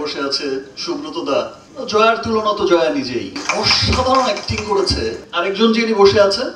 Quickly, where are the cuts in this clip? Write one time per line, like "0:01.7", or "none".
0:01.6
0:05.2